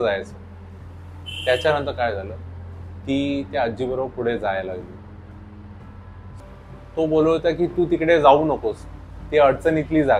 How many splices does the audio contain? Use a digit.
1